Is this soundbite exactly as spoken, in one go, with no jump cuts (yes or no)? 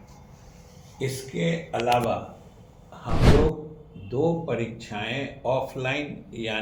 yes